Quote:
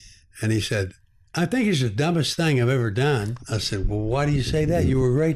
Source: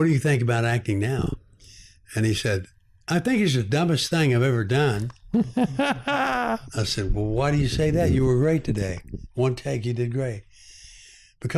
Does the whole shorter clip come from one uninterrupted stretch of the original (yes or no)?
no